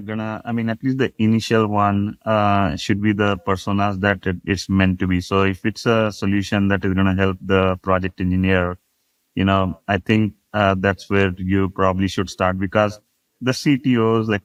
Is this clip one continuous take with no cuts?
yes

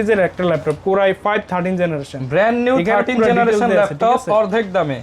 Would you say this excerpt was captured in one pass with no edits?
yes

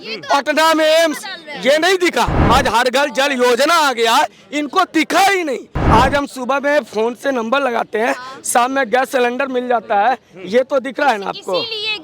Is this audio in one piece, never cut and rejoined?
no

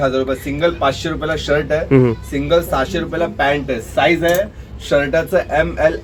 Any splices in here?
no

